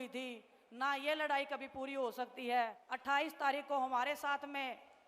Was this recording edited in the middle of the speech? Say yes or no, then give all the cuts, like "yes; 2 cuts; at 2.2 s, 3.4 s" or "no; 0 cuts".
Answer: yes; 1 cut; at 2.9 s